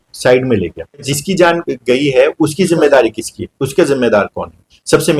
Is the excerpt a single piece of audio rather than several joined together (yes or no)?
no